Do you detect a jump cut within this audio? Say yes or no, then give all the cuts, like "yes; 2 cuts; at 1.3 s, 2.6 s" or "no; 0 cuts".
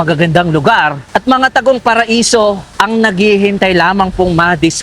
yes; 2 cuts; at 1.0 s, 2.7 s